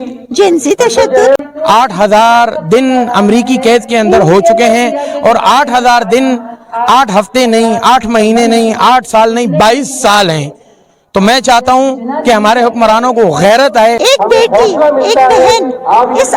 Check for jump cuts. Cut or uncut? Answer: cut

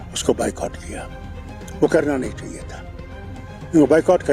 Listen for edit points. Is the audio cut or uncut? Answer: uncut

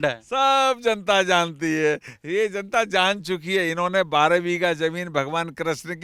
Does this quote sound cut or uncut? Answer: uncut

